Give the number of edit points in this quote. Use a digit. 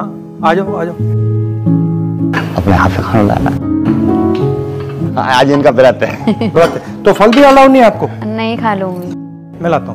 1